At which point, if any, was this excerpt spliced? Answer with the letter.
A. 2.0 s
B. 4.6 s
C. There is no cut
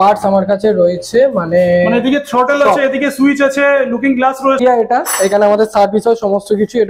B